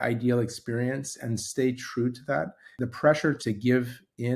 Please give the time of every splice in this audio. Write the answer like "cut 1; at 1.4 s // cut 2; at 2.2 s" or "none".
cut 1; at 2.6 s // cut 2; at 3.4 s